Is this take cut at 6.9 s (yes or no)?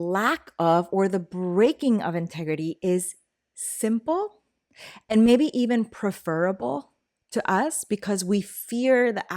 no